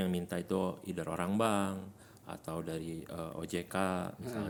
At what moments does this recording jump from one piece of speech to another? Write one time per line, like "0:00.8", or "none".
none